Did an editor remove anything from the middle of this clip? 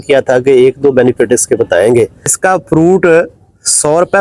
yes; 1 cut; at 2.4 s

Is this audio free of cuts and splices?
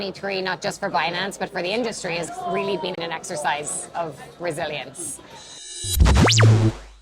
no; 2 cuts; at 3.0 s, 5.6 s

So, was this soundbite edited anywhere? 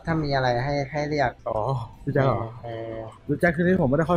yes; 2 cuts; at 1.4 s, 3.1 s

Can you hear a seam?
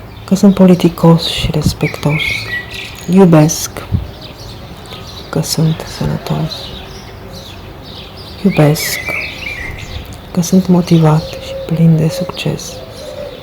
yes; 4 cuts; at 6.6 s, 8.4 s, 8.8 s, 10.3 s

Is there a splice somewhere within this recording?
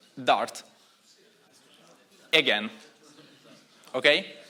no; 0 cuts

